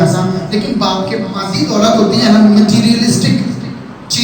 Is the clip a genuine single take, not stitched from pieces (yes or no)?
no